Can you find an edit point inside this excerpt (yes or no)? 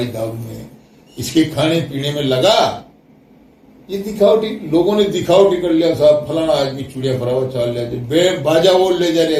no